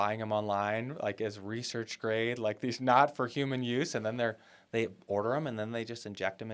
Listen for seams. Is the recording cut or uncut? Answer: uncut